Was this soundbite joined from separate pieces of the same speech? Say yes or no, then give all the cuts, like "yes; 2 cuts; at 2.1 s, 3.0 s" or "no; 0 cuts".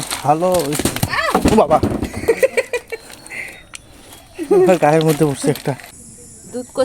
yes; 1 cut; at 5.6 s